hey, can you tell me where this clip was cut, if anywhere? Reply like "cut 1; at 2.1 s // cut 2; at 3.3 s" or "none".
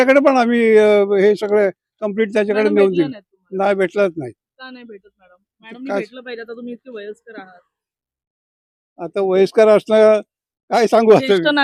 none